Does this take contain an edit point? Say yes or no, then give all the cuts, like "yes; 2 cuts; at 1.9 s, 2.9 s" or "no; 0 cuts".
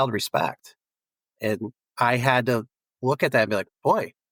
no; 0 cuts